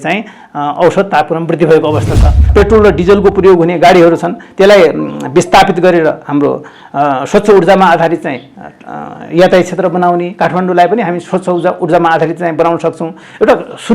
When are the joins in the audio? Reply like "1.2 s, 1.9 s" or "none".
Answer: 2.5 s